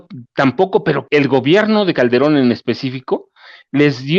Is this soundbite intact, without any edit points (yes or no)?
no